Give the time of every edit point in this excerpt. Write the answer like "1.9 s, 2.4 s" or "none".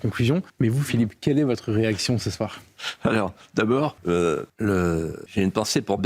4.4 s